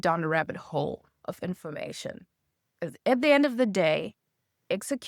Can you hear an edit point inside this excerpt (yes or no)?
no